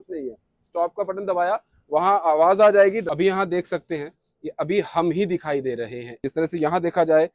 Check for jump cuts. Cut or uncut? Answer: cut